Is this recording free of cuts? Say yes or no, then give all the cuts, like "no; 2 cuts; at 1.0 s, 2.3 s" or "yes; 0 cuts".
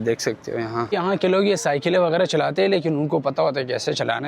no; 1 cut; at 0.9 s